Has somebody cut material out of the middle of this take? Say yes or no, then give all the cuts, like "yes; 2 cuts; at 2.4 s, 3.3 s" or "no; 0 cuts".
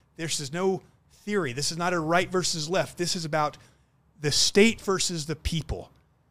no; 0 cuts